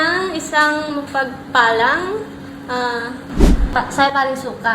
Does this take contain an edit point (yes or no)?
yes